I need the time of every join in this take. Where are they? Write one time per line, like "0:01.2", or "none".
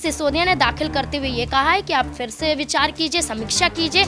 none